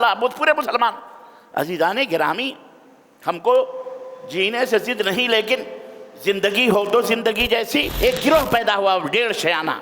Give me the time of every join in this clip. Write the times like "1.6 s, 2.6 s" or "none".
7.9 s